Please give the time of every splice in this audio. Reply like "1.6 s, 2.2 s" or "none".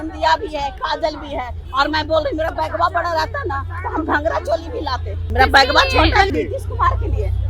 5.3 s, 6.3 s